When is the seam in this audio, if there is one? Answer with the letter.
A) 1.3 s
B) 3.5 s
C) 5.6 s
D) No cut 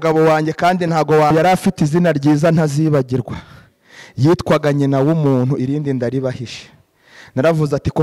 A